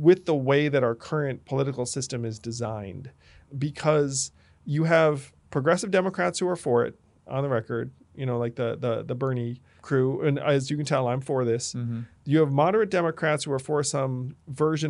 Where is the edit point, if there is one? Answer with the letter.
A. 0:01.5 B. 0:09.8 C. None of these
B